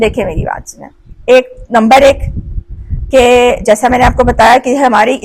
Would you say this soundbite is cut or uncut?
uncut